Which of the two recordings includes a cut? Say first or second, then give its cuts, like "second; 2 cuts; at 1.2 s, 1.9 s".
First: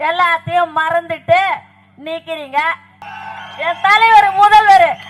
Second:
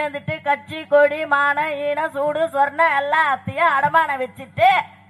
first; 1 cut; at 2.9 s